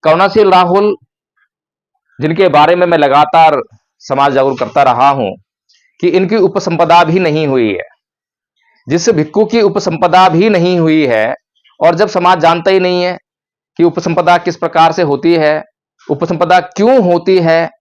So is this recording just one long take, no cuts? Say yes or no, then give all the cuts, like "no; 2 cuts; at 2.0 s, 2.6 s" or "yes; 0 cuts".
yes; 0 cuts